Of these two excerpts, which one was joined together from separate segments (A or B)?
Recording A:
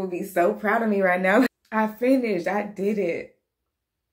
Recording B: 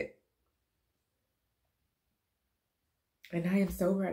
A